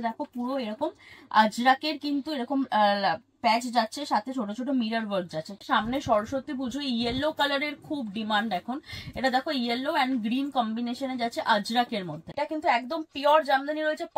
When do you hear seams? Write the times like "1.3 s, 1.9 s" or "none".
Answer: 5.6 s, 12.3 s